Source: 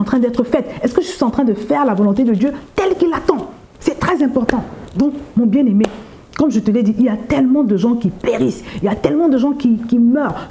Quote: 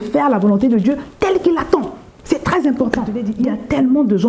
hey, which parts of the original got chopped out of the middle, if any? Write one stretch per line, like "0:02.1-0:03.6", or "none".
0:04.8-0:06.8